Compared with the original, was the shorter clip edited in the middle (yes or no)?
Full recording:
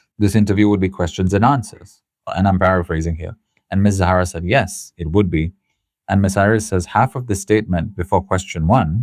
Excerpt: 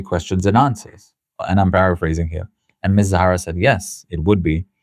no